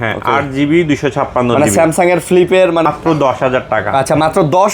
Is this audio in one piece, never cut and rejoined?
no; 1 cut; at 2.8 s

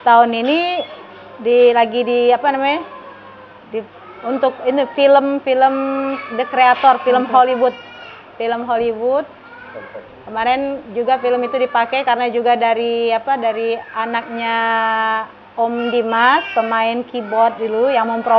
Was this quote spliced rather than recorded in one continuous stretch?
no; 0 cuts

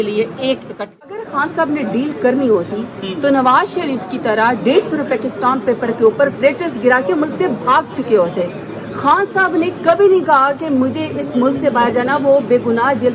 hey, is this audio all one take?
no; 1 cut; at 1.1 s

